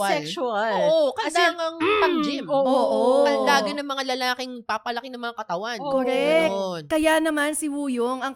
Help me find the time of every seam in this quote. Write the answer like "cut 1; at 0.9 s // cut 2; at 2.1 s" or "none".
none